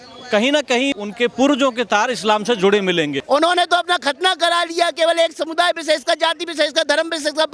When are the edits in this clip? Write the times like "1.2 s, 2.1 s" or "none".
1.0 s, 3.2 s